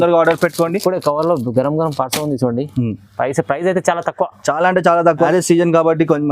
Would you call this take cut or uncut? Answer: cut